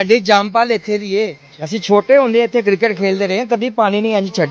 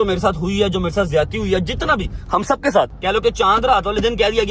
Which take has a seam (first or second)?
second